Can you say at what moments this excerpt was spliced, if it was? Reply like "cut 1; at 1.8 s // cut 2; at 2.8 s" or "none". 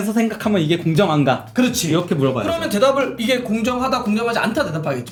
none